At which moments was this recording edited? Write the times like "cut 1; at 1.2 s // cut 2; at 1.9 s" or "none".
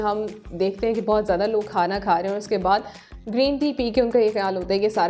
none